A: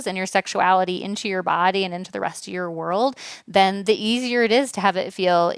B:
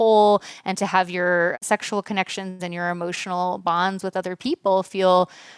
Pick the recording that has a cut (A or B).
B